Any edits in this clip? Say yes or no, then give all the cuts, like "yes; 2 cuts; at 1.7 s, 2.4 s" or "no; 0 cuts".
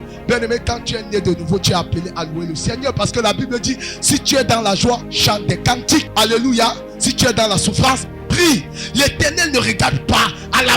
yes; 3 cuts; at 5.1 s, 6.1 s, 8.8 s